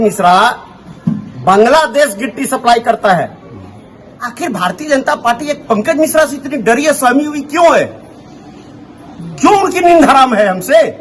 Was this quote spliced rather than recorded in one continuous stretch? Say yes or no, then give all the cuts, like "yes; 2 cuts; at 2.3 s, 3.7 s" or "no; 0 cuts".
yes; 1 cut; at 4.3 s